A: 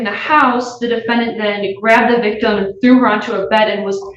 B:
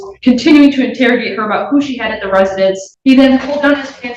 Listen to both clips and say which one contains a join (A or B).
B